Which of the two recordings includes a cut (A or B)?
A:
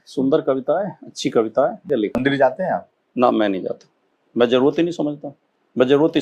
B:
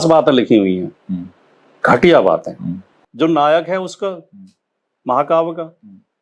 A